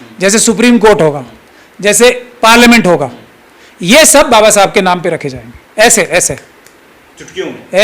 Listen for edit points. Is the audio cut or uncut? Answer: uncut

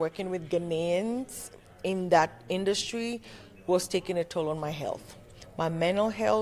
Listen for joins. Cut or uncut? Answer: uncut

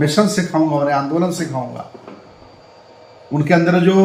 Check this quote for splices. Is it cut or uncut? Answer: uncut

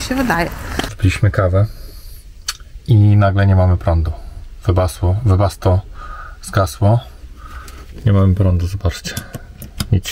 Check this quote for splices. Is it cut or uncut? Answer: cut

